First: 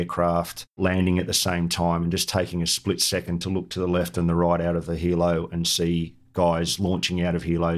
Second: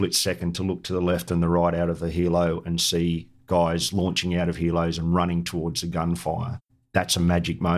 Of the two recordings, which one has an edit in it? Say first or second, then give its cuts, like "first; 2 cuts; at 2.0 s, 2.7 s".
second; 1 cut; at 6.6 s